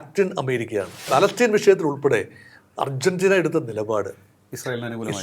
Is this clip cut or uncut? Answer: cut